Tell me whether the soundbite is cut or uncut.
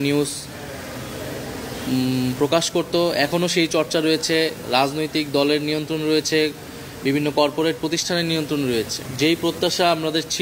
cut